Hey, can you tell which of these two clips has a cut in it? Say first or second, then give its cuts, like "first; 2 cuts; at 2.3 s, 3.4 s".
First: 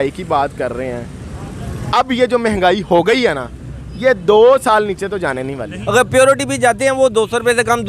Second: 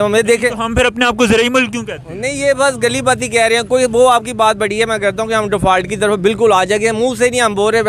first; 1 cut; at 5.7 s